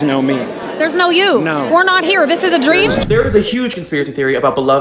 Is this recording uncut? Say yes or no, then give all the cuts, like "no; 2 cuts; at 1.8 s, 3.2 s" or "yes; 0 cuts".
no; 1 cut; at 3.0 s